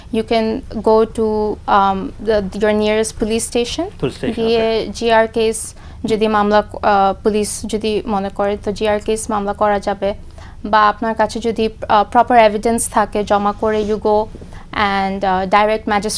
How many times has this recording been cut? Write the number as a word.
zero